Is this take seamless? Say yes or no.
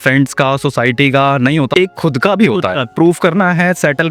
no